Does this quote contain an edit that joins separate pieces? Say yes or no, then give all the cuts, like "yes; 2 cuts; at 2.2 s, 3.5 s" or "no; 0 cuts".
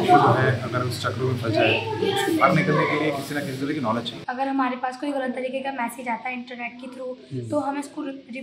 yes; 1 cut; at 4.1 s